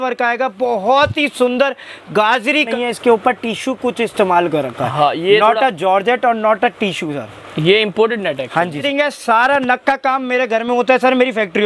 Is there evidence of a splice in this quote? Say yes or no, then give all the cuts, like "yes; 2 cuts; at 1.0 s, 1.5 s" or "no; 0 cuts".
yes; 2 cuts; at 2.7 s, 8.8 s